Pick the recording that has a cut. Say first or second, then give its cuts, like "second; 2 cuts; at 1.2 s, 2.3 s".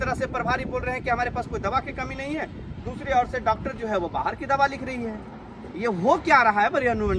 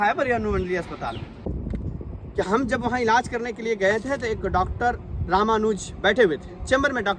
second; 1 cut; at 1.6 s